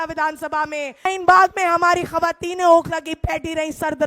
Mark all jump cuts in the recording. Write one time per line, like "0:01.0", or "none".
0:01.1